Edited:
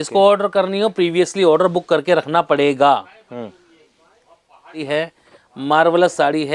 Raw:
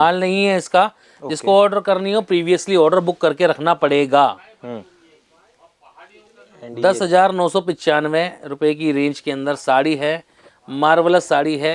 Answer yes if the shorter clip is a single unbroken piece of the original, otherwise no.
no